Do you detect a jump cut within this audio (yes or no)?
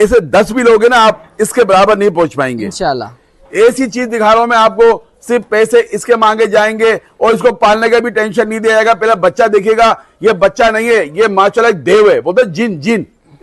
no